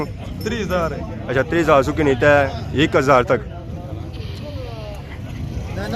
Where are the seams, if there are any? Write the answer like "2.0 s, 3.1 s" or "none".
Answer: none

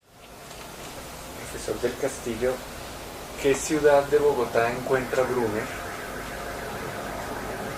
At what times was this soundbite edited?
none

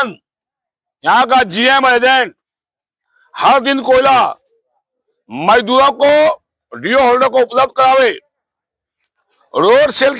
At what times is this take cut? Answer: none

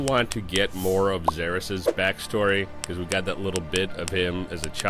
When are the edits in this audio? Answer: none

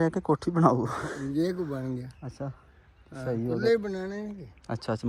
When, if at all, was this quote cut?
none

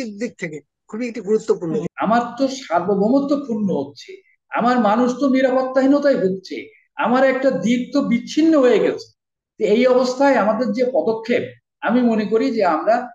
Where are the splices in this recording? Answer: 1.9 s

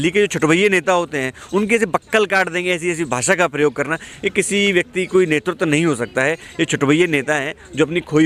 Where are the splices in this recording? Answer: none

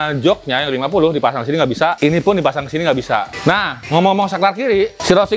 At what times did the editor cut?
3.3 s

